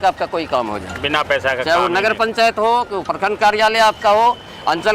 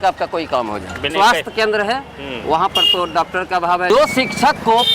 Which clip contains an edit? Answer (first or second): second